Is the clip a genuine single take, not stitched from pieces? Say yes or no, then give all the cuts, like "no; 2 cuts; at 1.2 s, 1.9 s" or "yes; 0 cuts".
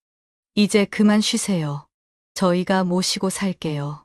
yes; 0 cuts